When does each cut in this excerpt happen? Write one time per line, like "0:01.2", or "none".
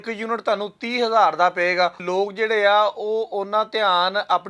0:02.0